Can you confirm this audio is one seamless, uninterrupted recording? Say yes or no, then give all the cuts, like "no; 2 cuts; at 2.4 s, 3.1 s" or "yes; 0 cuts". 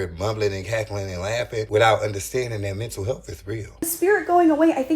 no; 2 cuts; at 1.7 s, 3.9 s